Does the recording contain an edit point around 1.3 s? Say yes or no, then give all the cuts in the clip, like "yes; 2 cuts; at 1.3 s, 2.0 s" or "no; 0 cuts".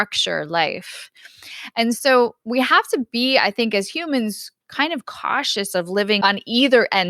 no; 1 cut; at 6.2 s